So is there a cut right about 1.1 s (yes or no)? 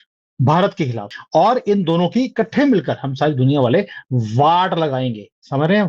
yes